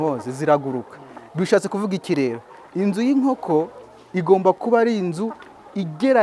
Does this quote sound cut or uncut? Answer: uncut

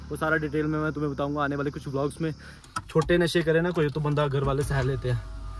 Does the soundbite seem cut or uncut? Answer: cut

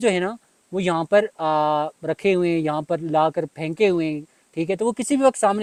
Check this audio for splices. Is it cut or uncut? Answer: uncut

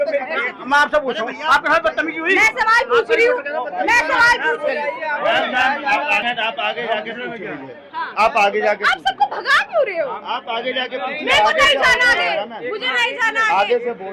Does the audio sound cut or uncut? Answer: cut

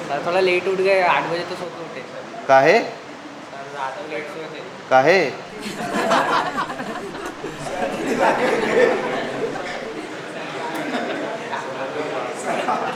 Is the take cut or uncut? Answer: uncut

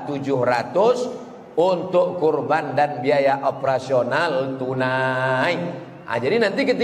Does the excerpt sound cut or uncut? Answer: uncut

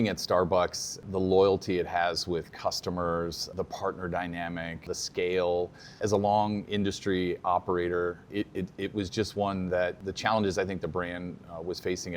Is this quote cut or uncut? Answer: cut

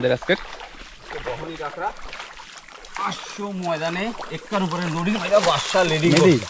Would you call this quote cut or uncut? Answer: uncut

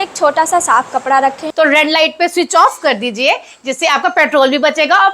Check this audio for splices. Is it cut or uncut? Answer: cut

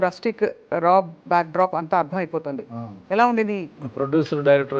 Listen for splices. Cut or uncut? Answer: cut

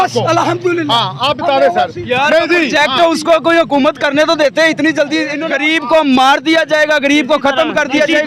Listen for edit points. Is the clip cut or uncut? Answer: cut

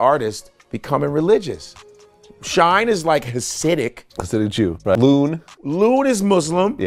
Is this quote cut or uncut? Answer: cut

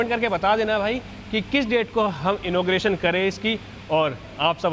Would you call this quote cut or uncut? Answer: uncut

